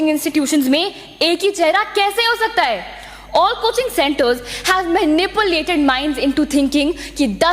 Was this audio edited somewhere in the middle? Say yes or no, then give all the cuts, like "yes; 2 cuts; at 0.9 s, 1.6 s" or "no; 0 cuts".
no; 0 cuts